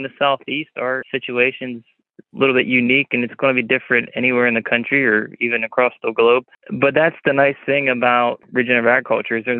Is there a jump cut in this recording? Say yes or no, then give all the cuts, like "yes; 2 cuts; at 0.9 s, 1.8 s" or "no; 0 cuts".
yes; 3 cuts; at 1.0 s, 6.6 s, 8.4 s